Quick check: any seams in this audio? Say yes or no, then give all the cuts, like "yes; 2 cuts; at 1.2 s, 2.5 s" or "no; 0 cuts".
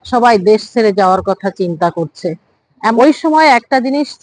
yes; 1 cut; at 2.9 s